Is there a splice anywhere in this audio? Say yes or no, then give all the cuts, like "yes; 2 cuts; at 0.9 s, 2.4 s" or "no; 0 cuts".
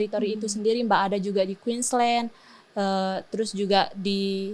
no; 0 cuts